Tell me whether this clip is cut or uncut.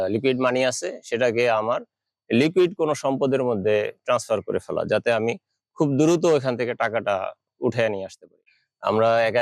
cut